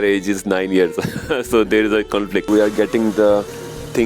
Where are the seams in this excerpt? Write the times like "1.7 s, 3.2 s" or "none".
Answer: 2.5 s